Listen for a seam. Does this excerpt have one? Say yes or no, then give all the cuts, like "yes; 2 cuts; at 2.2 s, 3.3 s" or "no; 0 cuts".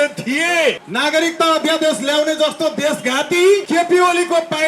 yes; 2 cuts; at 0.9 s, 3.6 s